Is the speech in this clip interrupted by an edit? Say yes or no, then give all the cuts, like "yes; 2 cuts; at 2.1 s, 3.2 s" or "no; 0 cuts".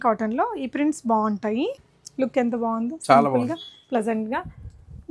no; 0 cuts